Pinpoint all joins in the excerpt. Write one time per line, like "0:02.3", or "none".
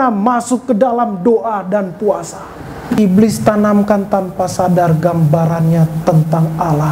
0:03.0